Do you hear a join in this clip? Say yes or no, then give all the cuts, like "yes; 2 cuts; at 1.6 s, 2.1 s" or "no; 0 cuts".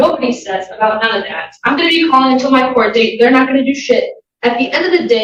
no; 0 cuts